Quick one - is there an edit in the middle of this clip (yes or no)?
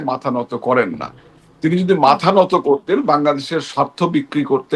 no